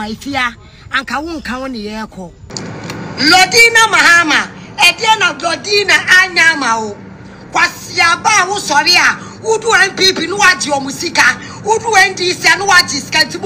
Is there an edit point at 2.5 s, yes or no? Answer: yes